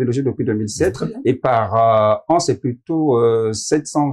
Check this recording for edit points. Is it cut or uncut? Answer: uncut